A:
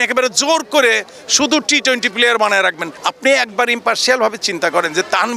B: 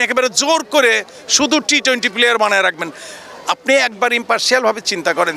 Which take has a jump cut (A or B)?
A